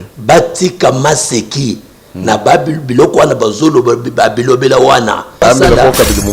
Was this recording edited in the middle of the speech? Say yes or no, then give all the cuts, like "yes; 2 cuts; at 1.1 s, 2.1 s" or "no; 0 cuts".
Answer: yes; 1 cut; at 5.4 s